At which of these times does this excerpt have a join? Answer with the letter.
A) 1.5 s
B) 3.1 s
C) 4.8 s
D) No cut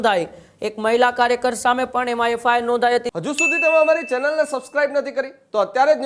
B